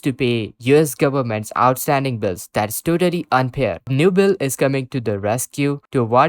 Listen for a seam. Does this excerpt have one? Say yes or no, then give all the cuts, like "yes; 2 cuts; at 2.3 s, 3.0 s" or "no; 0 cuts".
yes; 1 cut; at 3.9 s